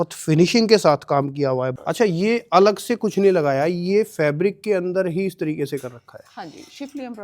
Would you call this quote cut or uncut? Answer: cut